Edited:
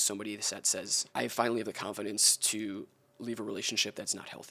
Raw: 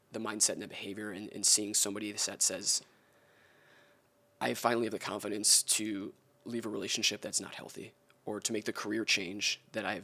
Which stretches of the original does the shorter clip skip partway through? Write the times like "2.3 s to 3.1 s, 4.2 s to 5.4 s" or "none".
2.7 s to 4.3 s